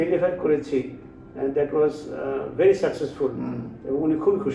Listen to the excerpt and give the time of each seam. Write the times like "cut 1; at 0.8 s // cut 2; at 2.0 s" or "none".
none